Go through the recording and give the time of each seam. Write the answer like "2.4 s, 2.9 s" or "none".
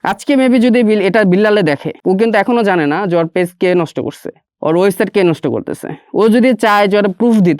1.9 s